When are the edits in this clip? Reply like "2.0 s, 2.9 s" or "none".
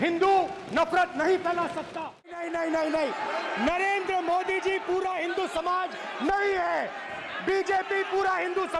2.2 s